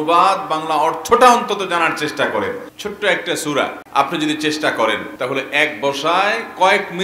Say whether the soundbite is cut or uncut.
cut